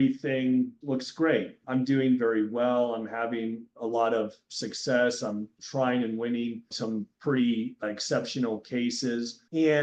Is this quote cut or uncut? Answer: uncut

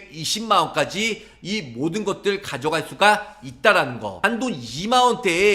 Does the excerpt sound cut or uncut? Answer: cut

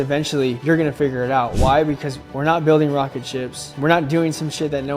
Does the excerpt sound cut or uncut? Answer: uncut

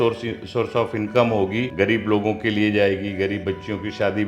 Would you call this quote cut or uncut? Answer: cut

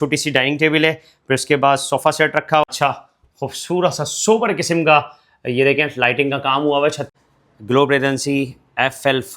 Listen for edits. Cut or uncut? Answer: cut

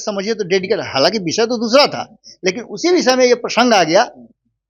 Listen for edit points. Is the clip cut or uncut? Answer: uncut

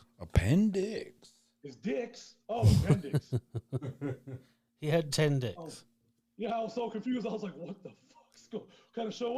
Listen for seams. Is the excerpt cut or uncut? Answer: uncut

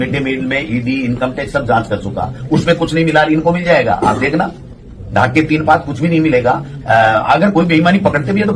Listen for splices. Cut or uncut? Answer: uncut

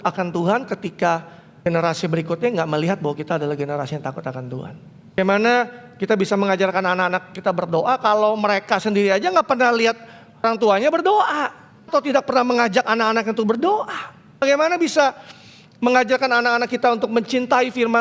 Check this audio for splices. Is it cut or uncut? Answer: cut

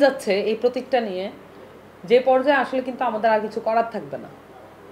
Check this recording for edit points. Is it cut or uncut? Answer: uncut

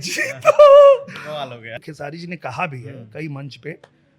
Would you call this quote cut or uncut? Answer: cut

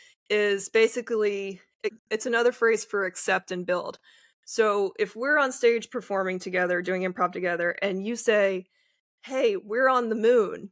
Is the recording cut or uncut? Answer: cut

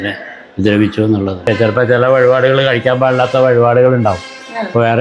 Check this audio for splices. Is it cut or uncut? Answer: cut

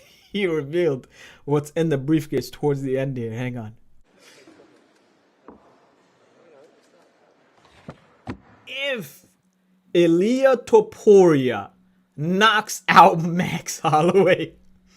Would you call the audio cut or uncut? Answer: cut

